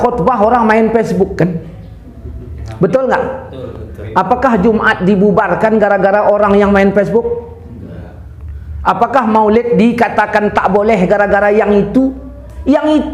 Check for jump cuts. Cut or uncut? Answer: uncut